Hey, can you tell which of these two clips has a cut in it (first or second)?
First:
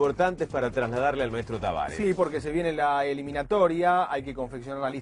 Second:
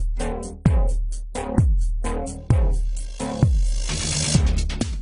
first